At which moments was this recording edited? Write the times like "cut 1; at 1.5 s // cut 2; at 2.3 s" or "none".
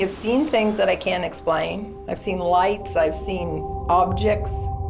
none